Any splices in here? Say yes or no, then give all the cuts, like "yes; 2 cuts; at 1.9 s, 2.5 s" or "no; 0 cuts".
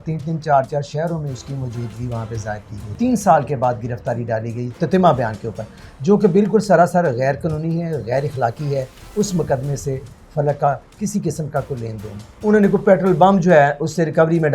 yes; 2 cuts; at 2.9 s, 12.3 s